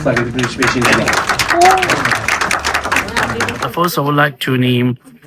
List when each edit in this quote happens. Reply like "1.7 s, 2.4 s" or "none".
3.7 s

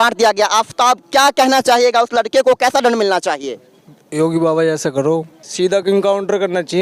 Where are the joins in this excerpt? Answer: 5.4 s

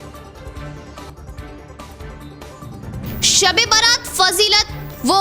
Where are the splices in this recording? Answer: 1.0 s

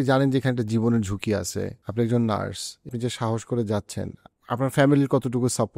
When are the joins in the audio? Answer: 1.8 s, 2.9 s, 4.3 s

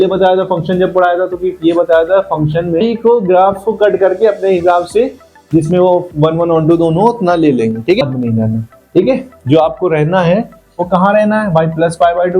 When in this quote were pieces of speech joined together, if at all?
2.8 s, 8.0 s

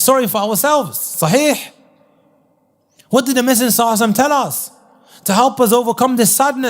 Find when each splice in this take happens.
none

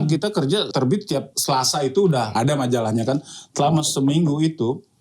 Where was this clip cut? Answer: 1.0 s, 2.3 s

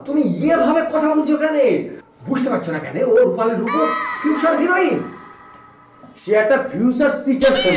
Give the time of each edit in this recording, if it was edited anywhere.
2.0 s

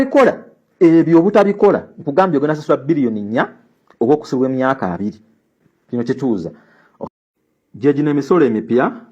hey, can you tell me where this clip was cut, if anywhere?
7.0 s

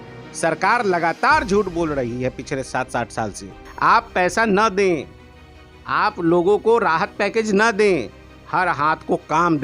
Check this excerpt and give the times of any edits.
3.6 s

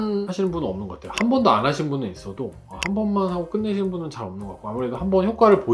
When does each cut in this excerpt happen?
none

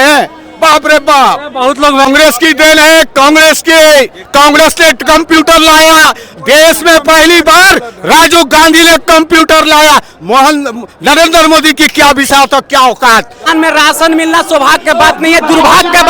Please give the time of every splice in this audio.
2.1 s, 13.5 s

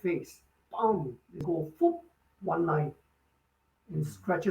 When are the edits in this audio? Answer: 1.4 s

